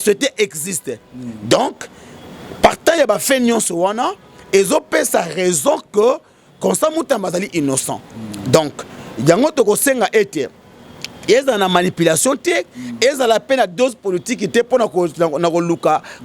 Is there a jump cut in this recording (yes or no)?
no